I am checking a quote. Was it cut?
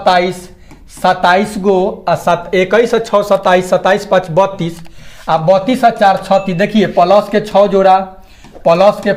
no; 0 cuts

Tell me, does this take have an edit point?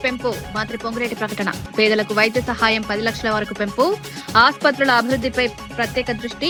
no; 0 cuts

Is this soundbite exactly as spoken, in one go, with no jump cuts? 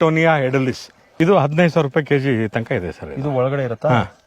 no; 1 cut; at 1.0 s

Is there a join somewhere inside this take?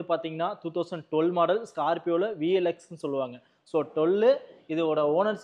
no; 0 cuts

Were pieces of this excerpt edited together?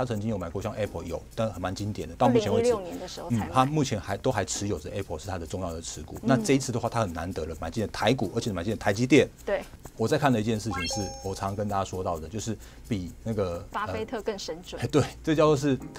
yes; 1 cut; at 9.7 s

